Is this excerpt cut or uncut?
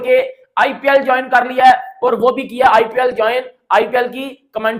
uncut